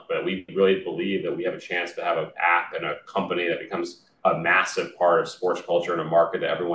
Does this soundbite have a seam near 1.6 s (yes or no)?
no